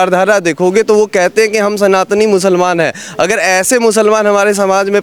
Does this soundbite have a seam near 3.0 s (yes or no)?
no